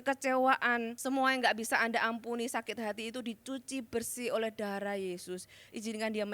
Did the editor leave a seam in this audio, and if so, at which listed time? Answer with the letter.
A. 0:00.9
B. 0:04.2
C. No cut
A